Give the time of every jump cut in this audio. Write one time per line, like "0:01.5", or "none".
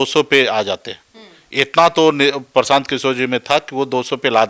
none